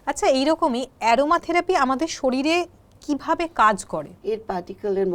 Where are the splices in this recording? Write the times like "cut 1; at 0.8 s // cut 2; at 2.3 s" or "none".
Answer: cut 1; at 4.1 s